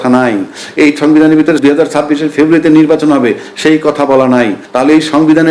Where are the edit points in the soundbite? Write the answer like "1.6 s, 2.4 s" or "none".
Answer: 1.5 s, 4.6 s

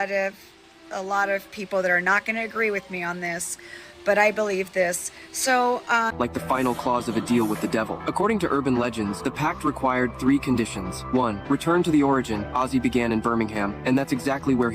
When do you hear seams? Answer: 6.1 s

